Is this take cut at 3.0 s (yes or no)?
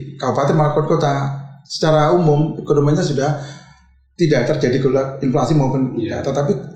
no